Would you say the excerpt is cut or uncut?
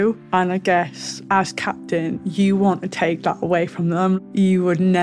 uncut